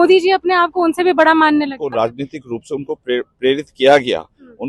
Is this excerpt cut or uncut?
cut